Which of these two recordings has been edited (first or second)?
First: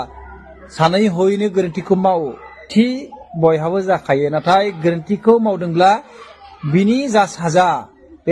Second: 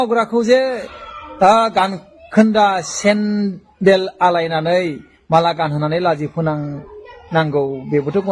first